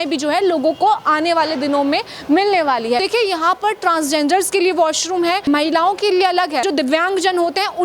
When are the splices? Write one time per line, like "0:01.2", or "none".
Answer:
0:03.0
0:06.6